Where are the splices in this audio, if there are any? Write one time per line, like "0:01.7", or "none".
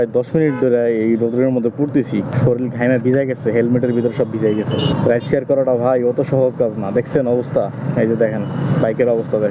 none